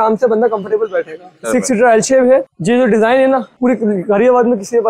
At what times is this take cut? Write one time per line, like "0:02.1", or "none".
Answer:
0:01.4
0:02.5
0:03.5